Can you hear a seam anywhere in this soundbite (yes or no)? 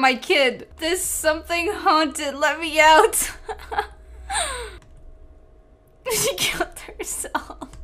no